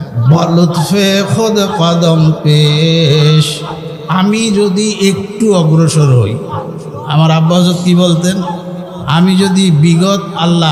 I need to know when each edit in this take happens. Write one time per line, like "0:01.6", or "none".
none